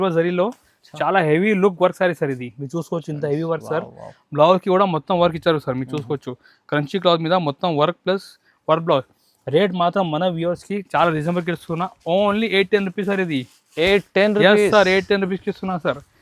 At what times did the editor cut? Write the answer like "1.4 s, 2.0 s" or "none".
none